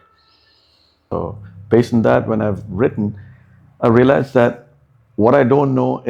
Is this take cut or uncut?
uncut